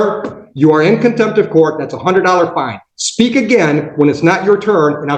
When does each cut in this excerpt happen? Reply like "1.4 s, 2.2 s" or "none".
none